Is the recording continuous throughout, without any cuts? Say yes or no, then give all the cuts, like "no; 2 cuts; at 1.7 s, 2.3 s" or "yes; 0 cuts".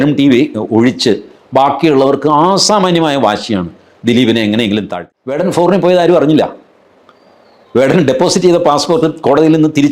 no; 1 cut; at 4.9 s